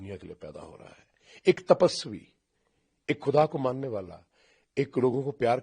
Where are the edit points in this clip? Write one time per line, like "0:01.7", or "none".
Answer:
none